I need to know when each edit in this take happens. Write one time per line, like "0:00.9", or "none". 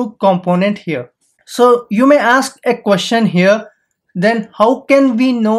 0:01.2